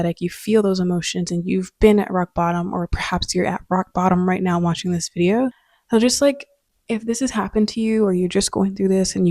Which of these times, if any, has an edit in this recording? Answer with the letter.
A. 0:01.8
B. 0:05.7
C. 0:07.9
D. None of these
B